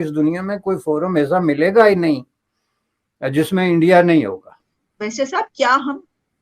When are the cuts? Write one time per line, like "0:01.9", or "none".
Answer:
0:04.7